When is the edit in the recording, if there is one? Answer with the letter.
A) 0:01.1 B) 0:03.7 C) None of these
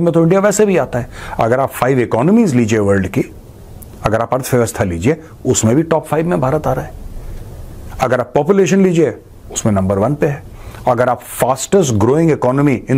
C